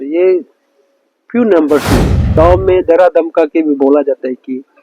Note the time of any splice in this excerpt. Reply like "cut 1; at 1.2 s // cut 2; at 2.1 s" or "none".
cut 1; at 2.2 s